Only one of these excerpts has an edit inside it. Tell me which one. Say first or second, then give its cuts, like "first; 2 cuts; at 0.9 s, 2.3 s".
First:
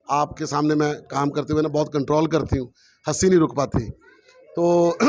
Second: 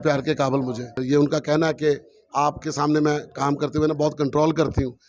second; 1 cut; at 1.0 s